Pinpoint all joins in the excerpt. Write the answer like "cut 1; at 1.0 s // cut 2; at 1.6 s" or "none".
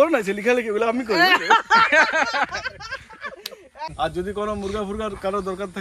cut 1; at 3.9 s